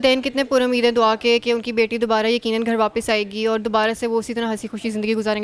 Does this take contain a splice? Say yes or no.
no